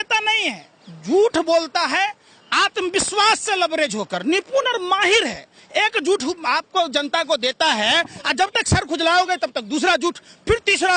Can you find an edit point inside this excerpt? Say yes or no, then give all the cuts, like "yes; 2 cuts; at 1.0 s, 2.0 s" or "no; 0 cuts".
no; 0 cuts